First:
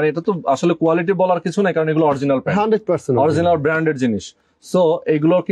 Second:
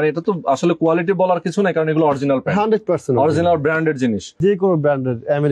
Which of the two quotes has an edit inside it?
second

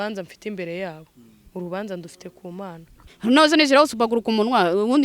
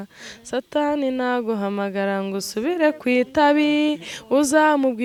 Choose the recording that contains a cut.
first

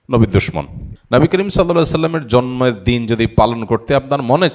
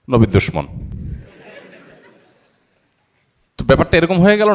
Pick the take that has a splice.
first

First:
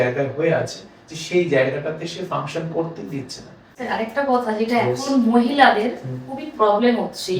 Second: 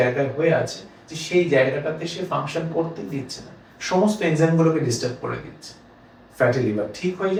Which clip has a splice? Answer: first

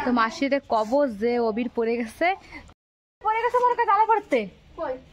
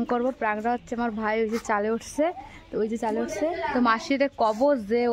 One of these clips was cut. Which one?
first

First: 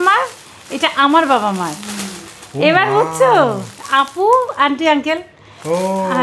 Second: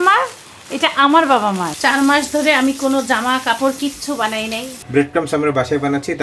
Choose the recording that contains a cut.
second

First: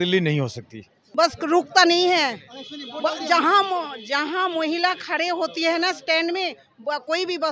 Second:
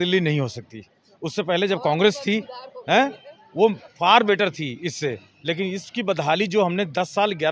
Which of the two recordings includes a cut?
first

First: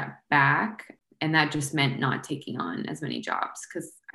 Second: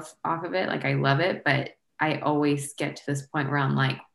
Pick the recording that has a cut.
first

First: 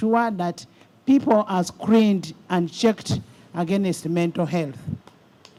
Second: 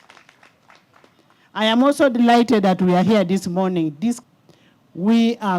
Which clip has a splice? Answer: second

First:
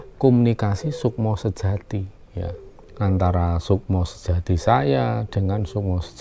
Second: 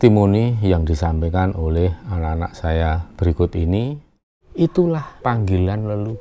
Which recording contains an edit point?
second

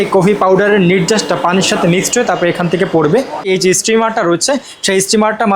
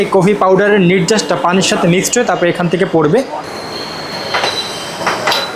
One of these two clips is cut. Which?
first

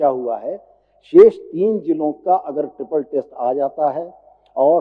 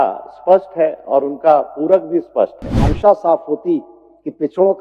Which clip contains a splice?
second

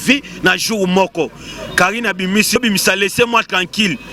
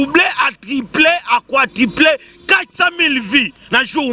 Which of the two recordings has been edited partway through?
first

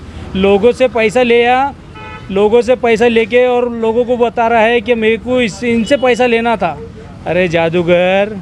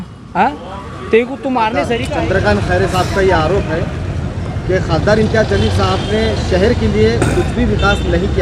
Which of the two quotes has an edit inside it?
second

